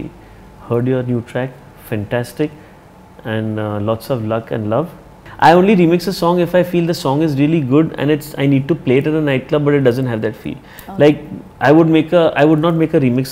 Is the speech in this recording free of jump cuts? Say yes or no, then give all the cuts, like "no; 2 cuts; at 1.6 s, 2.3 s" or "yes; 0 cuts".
no; 1 cut; at 5.3 s